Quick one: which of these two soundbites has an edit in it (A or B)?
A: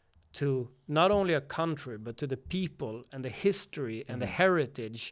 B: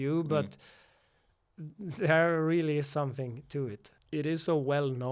B